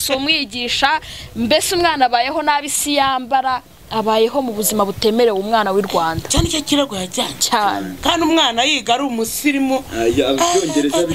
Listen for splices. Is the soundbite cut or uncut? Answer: uncut